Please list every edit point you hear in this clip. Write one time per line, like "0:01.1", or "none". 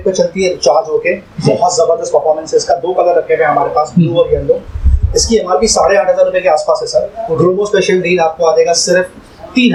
none